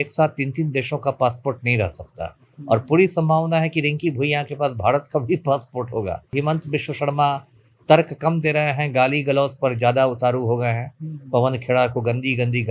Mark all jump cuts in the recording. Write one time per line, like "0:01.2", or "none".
0:06.3

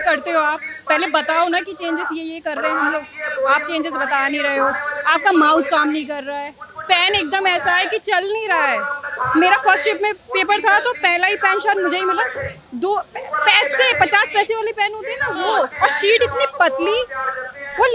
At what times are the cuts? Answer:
none

